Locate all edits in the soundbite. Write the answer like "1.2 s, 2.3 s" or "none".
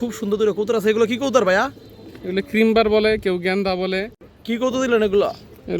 4.1 s